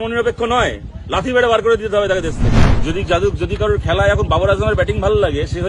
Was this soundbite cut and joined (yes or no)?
yes